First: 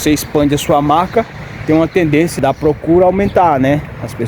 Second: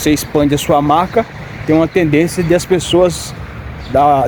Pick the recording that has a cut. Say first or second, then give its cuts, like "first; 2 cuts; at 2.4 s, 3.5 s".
first; 1 cut; at 2.4 s